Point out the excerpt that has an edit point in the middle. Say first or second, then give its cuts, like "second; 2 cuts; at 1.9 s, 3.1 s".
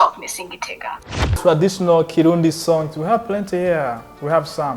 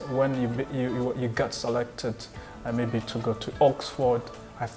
first; 1 cut; at 1.3 s